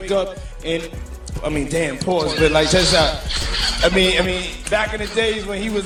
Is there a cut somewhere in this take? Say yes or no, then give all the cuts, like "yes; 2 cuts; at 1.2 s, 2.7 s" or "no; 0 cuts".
no; 0 cuts